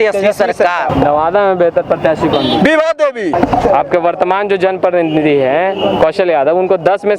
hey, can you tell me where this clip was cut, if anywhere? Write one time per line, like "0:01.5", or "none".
0:00.9
0:03.3

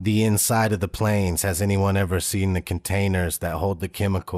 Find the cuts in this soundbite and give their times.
none

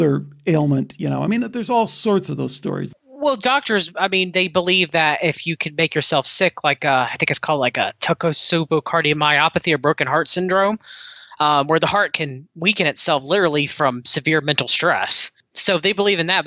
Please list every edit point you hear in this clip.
0:02.9
0:15.5

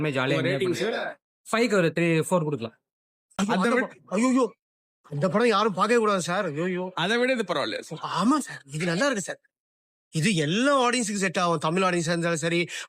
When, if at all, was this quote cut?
0:03.2

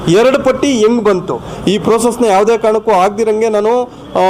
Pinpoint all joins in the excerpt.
0:01.5

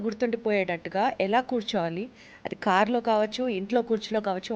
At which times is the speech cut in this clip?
none

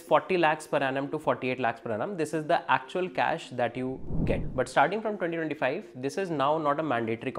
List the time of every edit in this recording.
0:04.4

